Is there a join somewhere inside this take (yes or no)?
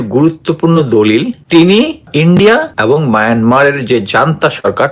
yes